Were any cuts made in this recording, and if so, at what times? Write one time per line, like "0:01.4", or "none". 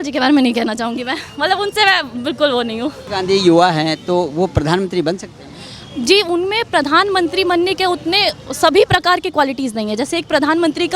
0:03.0